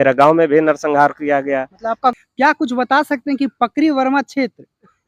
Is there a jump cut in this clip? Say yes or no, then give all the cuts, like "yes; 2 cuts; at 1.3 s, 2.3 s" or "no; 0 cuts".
yes; 1 cut; at 2.1 s